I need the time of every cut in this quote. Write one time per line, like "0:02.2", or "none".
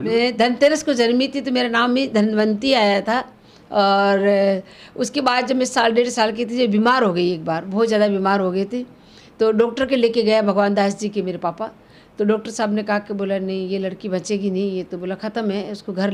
none